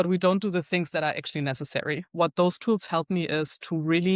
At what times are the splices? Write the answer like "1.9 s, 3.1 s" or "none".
2.1 s